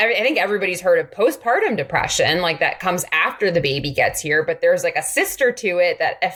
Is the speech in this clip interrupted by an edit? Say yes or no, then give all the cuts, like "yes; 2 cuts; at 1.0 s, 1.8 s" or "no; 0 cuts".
no; 0 cuts